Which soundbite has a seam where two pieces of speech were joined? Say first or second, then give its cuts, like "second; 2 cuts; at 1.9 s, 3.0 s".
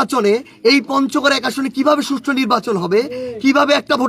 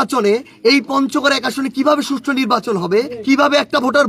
second; 1 cut; at 3.1 s